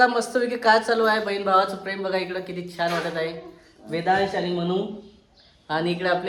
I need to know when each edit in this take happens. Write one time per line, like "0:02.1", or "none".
none

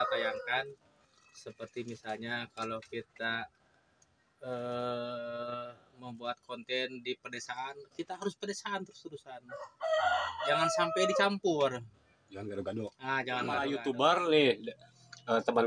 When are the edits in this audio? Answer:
0:13.5

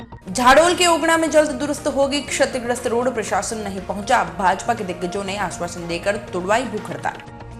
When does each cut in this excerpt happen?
none

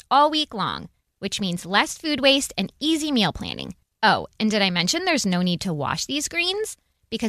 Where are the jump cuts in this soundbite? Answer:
none

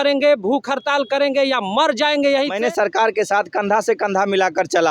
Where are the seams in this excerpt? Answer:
0:02.5

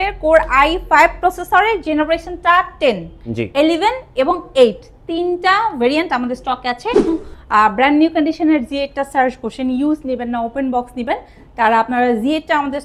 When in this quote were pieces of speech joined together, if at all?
0:07.1

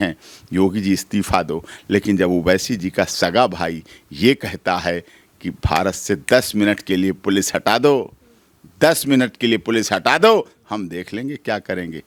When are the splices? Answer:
none

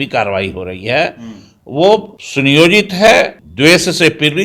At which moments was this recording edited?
0:02.2
0:03.4

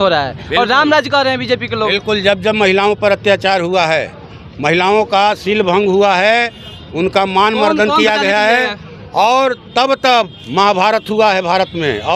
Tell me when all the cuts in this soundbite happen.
none

